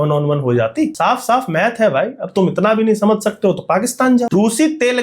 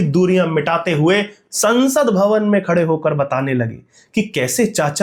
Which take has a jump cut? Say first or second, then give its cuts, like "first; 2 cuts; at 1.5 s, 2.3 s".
first; 2 cuts; at 0.9 s, 4.3 s